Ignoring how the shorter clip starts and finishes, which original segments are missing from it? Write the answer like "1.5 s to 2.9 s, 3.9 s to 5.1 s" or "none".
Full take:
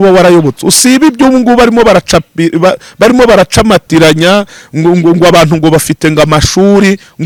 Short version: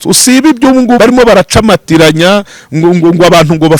1.5 s to 3.0 s